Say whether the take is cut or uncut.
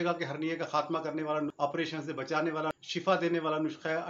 cut